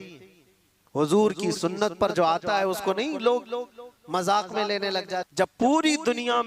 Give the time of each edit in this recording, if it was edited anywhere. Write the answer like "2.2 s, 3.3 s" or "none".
5.3 s